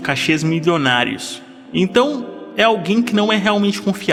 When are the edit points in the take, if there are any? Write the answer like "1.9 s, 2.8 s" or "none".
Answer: none